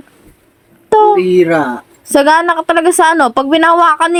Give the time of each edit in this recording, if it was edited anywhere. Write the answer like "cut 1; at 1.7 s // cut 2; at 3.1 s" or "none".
none